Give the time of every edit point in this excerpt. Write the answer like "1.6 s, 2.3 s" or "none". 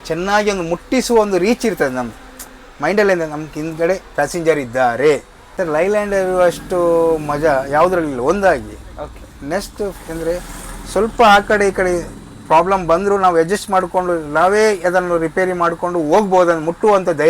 5.4 s